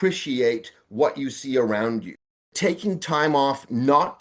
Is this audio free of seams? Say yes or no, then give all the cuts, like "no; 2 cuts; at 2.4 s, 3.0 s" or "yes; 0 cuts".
no; 1 cut; at 2.4 s